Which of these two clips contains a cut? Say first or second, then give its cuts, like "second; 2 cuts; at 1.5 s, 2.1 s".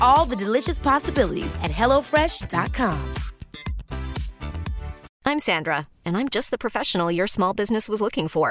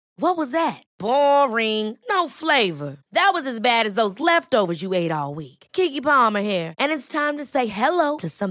first; 1 cut; at 5.1 s